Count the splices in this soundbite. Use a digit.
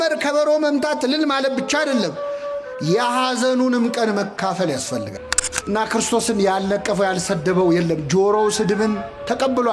1